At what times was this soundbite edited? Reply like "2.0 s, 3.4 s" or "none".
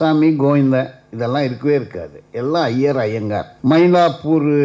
3.5 s